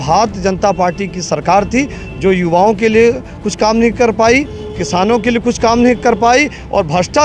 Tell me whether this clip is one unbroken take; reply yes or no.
yes